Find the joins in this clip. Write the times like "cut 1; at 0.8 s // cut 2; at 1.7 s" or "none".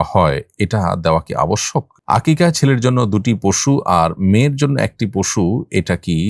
cut 1; at 1.9 s